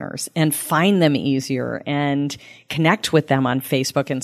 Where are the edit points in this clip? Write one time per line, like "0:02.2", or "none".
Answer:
none

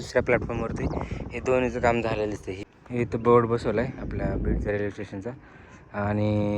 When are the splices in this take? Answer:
0:02.5

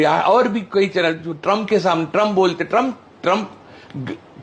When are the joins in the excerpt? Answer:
0:01.3

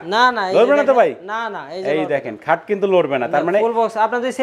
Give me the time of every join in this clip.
none

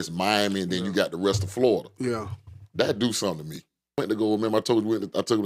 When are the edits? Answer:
0:04.0

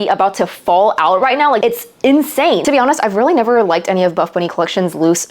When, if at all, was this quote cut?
0:01.6
0:02.6

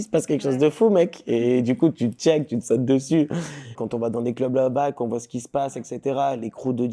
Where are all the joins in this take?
0:03.8

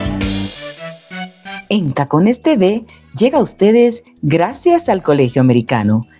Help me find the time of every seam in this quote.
0:01.5

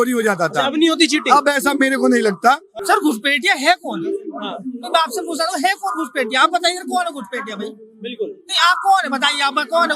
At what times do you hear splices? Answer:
0:02.8

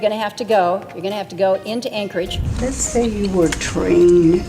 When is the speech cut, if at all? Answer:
0:02.5

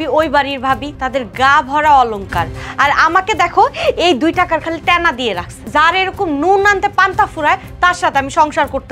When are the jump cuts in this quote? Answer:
0:00.9
0:05.5

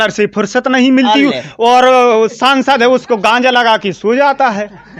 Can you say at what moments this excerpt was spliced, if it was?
none

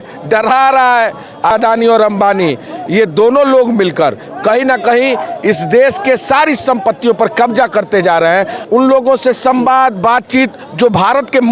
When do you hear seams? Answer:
0:01.5
0:08.6

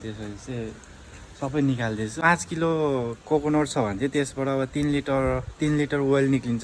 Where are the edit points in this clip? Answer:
0:02.2

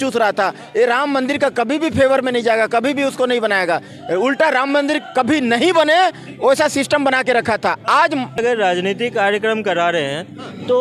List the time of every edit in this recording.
0:08.4

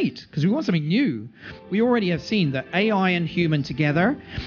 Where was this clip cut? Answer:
0:01.6

